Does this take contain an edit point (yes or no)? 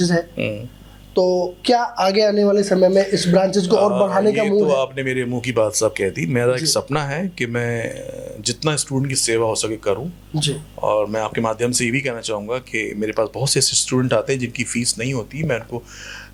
no